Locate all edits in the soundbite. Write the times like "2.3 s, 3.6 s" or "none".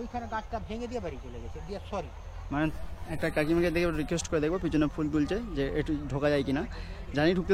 2.8 s